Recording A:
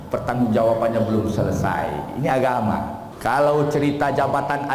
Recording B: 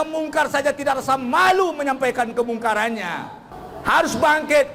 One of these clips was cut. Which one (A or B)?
A